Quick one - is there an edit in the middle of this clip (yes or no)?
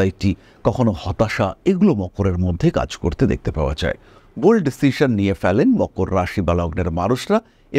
yes